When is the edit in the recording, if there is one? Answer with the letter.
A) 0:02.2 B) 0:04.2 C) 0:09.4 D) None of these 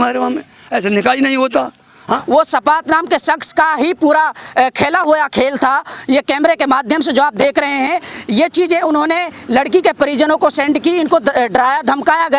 A